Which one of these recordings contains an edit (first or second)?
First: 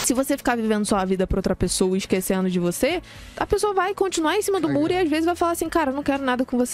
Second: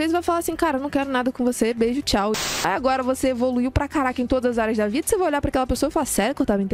second